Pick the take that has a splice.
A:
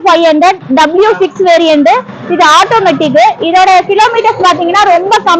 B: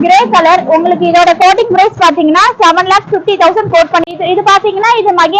B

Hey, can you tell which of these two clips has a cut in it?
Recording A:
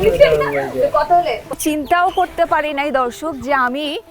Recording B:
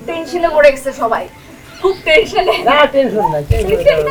A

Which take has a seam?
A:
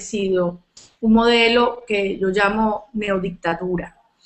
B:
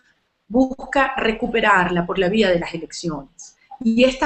A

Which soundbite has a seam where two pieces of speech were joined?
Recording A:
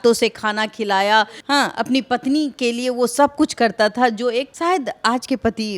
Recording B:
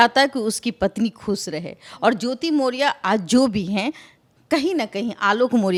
A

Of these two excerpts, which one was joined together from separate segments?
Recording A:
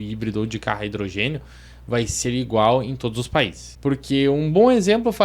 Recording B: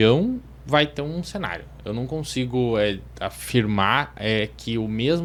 A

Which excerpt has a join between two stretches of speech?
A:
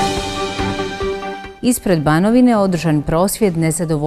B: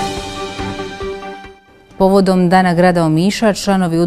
A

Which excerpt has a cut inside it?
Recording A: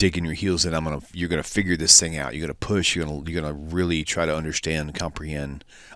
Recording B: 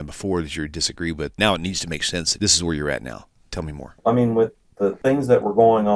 B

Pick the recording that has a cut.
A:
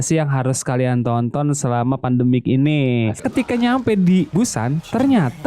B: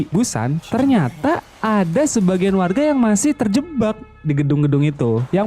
A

